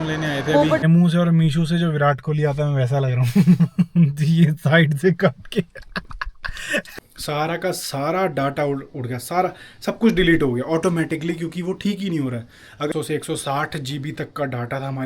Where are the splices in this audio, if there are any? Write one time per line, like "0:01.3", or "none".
0:00.8
0:07.0
0:12.9

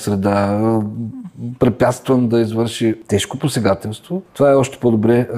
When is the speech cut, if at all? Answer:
0:03.0
0:04.3

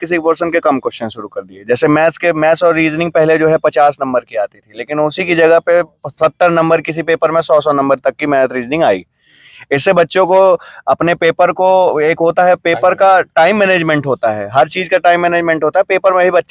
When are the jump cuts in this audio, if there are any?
none

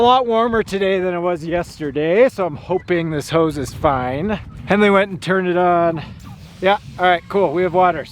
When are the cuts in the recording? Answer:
0:04.5

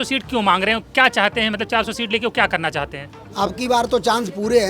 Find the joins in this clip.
0:03.1

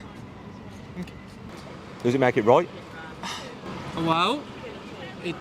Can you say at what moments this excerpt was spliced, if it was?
0:01.5

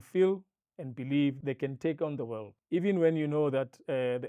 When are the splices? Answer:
0:01.4
0:02.5

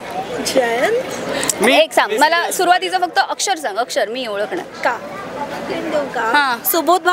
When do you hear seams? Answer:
0:05.8

